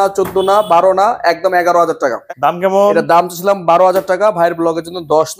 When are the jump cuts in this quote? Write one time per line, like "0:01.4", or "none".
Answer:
0:02.2